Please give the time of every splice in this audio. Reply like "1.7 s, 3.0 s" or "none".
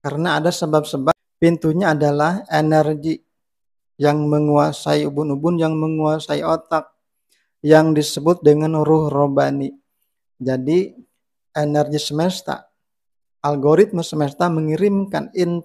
1.1 s